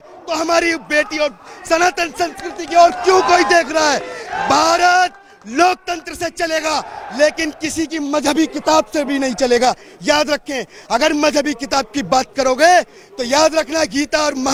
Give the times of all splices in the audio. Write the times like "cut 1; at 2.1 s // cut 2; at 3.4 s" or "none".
none